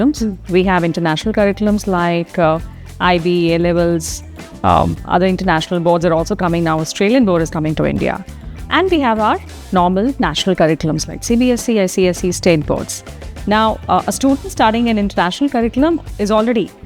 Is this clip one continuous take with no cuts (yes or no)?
yes